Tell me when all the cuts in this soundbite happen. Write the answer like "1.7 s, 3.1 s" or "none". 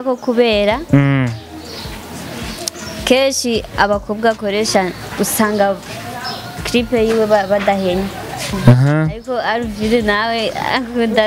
none